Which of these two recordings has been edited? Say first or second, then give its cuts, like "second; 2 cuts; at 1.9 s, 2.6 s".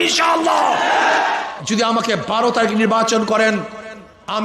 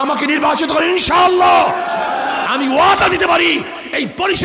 first; 1 cut; at 1.4 s